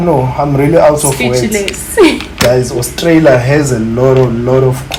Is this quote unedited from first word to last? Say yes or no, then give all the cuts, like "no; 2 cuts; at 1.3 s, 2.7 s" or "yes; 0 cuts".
yes; 0 cuts